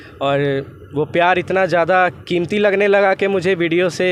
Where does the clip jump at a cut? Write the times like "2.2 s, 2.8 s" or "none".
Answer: none